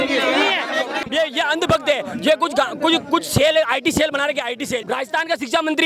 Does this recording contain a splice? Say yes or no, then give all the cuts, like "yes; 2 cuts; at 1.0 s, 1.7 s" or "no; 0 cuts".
yes; 2 cuts; at 1.0 s, 4.7 s